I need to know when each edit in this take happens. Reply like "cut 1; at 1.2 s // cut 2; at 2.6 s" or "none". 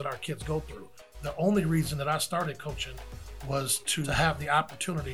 cut 1; at 1.1 s // cut 2; at 4.1 s